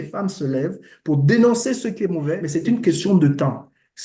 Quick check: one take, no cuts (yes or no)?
no